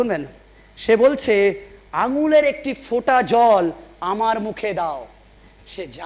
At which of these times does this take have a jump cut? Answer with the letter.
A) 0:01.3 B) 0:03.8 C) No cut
C